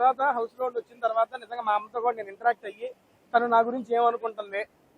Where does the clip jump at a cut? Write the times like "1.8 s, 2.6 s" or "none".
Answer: none